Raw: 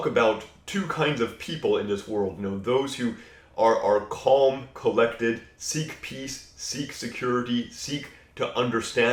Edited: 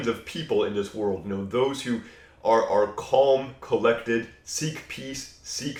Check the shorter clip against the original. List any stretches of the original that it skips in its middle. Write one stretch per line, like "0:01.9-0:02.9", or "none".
none